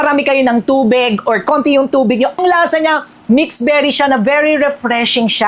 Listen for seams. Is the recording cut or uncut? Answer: cut